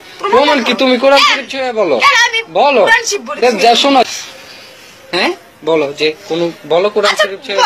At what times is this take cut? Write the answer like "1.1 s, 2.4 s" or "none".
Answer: 3.6 s